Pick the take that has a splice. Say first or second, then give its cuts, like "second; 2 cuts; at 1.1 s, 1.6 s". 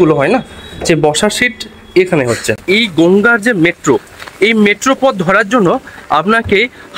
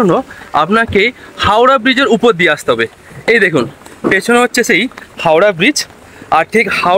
first; 1 cut; at 2.6 s